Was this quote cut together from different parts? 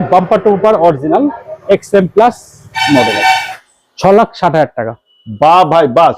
yes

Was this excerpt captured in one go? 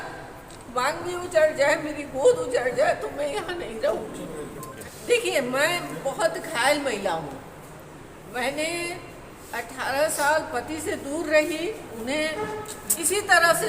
no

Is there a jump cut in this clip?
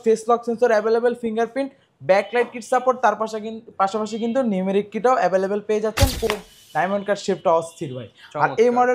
yes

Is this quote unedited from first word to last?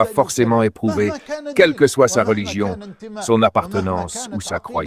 yes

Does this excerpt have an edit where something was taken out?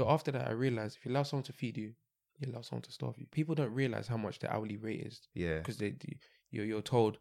yes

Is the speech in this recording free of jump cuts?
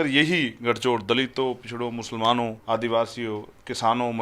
no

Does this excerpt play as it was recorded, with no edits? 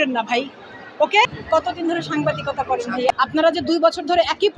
no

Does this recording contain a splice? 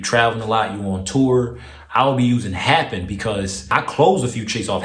yes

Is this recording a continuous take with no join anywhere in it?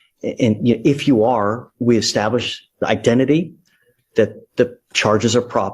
yes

